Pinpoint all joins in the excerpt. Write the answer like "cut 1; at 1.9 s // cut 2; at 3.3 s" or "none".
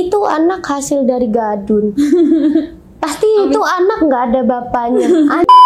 none